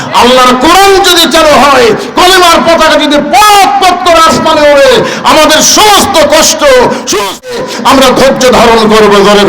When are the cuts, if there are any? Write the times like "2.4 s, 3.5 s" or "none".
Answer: 7.5 s